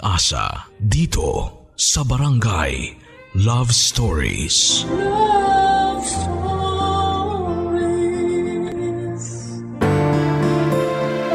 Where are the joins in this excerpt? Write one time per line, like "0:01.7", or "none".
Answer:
0:09.7